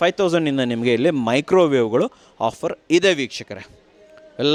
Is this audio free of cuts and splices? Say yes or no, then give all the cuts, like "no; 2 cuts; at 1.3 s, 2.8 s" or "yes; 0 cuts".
yes; 0 cuts